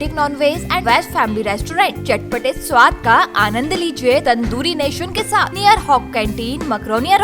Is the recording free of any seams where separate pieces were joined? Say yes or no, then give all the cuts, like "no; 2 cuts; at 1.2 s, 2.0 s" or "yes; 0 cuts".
no; 3 cuts; at 0.8 s, 4.2 s, 5.5 s